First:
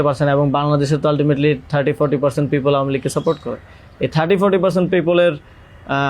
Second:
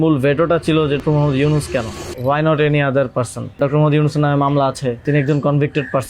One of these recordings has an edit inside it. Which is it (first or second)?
second